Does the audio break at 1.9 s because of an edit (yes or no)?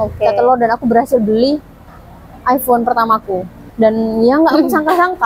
no